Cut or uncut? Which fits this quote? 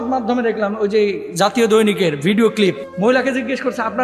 cut